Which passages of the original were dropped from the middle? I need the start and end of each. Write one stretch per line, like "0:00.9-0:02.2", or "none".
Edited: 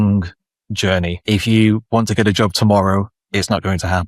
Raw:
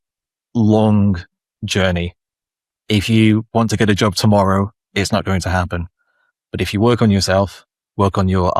0:02.1-0:02.8